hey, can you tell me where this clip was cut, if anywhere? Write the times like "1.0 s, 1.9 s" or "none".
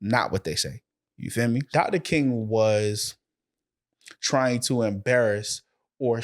1.7 s

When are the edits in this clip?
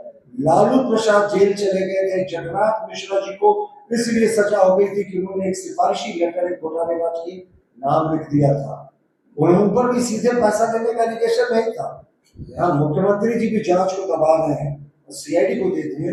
none

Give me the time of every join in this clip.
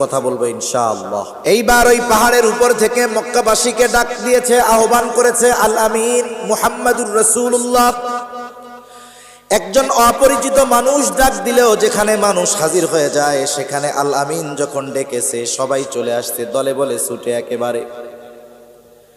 1.3 s

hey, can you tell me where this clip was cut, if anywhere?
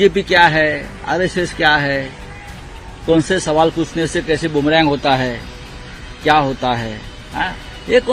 none

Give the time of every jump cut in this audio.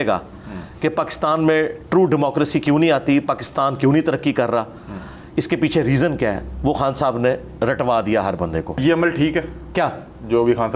8.8 s

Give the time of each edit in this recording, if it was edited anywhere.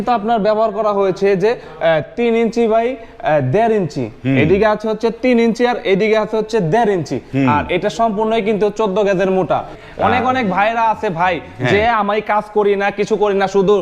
9.8 s

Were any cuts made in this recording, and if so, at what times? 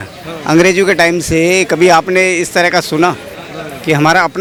none

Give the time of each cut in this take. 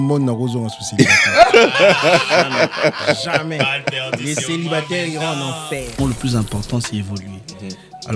6.0 s

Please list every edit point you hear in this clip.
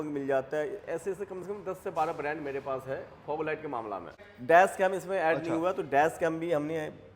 none

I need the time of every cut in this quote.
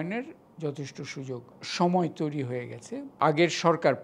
1.6 s, 3.1 s

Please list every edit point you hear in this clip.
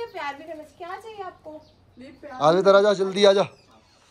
none

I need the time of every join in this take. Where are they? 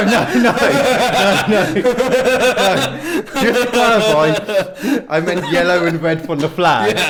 none

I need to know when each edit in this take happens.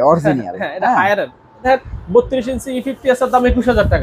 1.6 s

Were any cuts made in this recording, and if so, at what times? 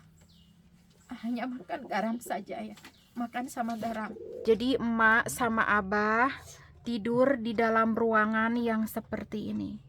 4.3 s

